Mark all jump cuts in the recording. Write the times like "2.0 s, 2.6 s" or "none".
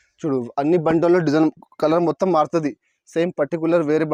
none